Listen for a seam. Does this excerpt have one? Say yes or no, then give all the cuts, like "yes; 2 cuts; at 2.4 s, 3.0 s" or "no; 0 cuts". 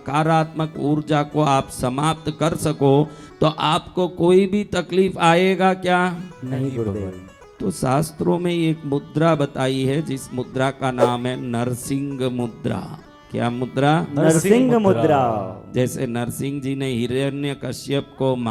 no; 0 cuts